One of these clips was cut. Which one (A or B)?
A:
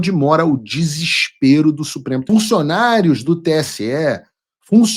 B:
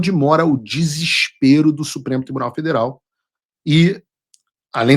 A